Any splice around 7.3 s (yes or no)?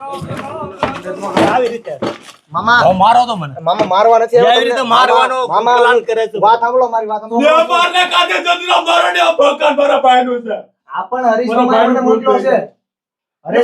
yes